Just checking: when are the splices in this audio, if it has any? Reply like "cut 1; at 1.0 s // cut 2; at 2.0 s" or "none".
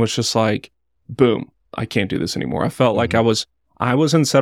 cut 1; at 1.7 s